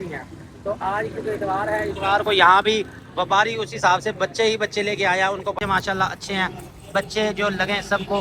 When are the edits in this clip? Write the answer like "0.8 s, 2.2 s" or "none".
5.5 s